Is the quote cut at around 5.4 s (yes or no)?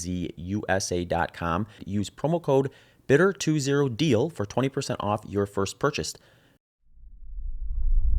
no